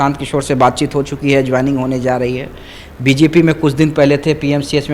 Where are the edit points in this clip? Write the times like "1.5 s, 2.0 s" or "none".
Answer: none